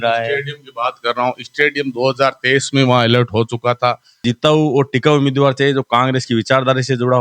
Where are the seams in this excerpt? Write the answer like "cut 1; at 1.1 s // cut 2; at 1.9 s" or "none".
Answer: cut 1; at 4.2 s